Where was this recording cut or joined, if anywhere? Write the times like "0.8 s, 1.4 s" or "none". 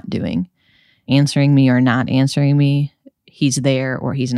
none